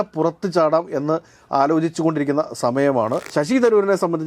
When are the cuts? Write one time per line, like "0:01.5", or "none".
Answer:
0:03.2